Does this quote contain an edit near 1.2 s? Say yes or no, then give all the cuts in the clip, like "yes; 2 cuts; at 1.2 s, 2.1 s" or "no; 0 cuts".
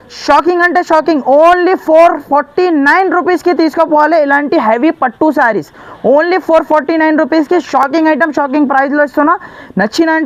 no; 0 cuts